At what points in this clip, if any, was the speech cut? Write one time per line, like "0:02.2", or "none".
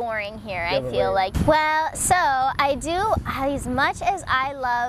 0:01.3